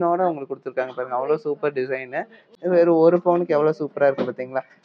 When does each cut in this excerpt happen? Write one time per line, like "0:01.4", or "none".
0:02.4